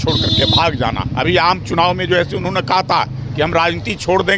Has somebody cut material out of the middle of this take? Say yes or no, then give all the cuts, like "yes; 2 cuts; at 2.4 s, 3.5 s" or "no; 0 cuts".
yes; 1 cut; at 1.1 s